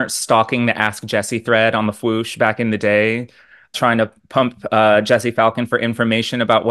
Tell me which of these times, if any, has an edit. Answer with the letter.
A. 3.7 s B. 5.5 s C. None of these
A